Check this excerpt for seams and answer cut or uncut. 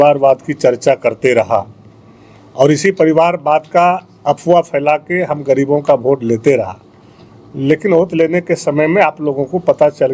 uncut